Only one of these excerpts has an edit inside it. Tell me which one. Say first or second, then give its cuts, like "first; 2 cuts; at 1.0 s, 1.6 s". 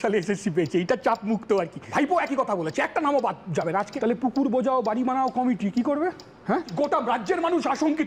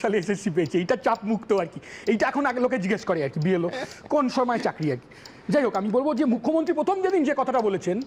first; 3 cuts; at 1.8 s, 3.9 s, 6.7 s